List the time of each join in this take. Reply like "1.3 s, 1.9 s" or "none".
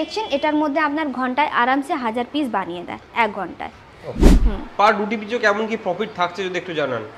4.2 s